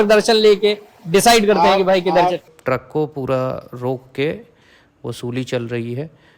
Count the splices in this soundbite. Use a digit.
1